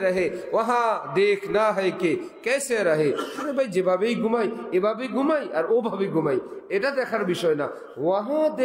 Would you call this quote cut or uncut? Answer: uncut